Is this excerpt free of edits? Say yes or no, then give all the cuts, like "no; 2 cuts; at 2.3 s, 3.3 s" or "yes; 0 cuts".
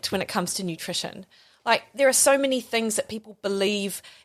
yes; 0 cuts